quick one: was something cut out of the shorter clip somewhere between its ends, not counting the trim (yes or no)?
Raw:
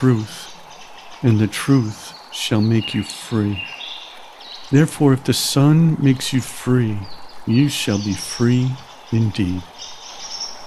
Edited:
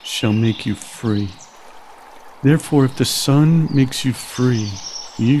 no